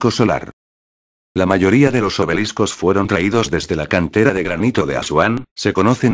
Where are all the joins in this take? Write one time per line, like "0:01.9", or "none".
none